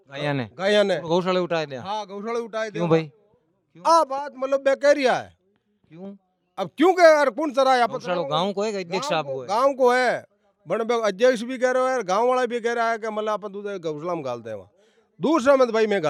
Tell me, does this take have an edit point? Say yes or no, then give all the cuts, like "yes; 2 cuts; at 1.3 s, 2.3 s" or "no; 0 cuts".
no; 0 cuts